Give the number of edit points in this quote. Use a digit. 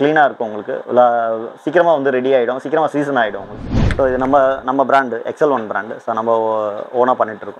1